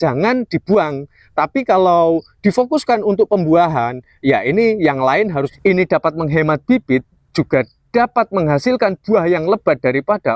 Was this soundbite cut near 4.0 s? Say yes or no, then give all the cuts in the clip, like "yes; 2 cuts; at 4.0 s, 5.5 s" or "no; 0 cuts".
no; 1 cut; at 5.3 s